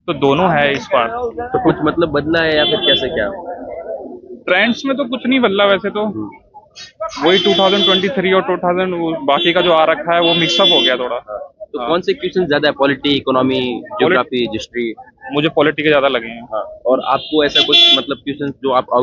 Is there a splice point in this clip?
no; 0 cuts

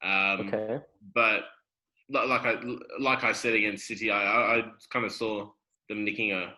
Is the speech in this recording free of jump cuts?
yes; 0 cuts

